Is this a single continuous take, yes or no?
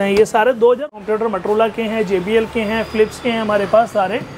no